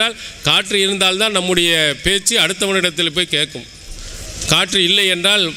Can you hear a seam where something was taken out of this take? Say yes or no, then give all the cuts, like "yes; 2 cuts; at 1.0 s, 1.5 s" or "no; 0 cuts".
no; 0 cuts